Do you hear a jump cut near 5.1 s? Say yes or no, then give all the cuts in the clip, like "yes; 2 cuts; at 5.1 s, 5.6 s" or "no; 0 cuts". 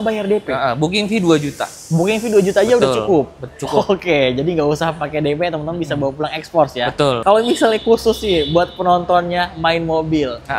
no; 1 cut; at 7.2 s